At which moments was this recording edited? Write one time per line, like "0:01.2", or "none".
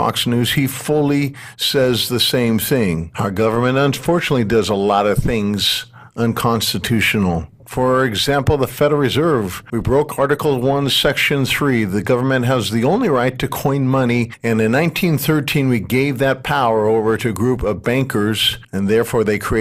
0:17.3